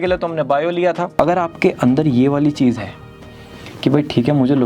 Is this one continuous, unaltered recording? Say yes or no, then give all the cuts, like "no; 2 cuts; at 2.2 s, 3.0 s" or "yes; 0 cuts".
no; 1 cut; at 1.1 s